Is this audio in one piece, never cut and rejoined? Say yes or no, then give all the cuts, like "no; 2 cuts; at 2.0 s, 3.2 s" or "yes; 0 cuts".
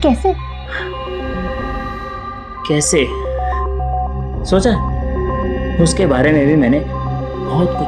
yes; 0 cuts